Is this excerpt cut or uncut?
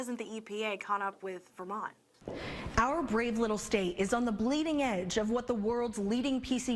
cut